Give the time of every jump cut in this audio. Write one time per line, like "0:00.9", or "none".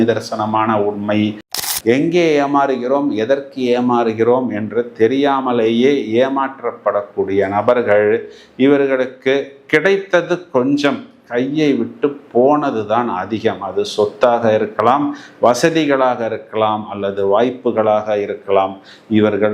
0:01.6